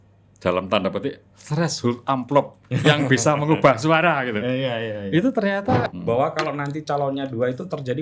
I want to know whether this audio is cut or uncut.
cut